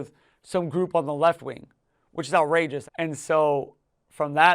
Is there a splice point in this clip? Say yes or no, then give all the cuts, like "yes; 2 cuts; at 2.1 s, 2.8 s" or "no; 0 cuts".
yes; 1 cut; at 2.9 s